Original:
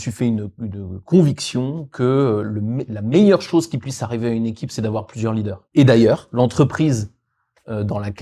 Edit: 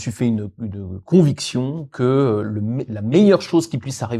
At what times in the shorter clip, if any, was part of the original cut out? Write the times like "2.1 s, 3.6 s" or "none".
none